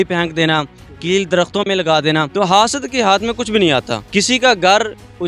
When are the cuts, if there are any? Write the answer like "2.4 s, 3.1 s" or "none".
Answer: 2.3 s, 4.0 s